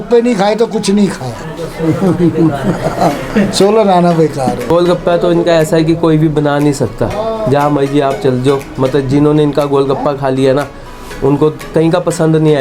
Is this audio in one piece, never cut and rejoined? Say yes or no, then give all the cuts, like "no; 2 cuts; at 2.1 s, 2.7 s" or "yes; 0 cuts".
no; 2 cuts; at 4.7 s, 11.6 s